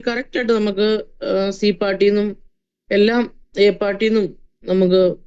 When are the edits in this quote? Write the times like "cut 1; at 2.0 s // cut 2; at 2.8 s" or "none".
none